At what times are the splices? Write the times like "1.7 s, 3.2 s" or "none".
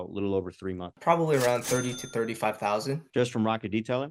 0.9 s, 3.0 s